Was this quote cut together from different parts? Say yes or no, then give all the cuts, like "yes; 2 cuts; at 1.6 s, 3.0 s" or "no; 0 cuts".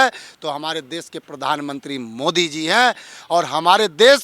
no; 0 cuts